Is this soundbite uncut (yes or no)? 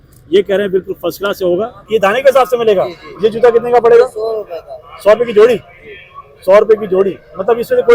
no